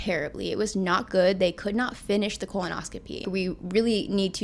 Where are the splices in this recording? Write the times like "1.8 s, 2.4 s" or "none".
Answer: 3.3 s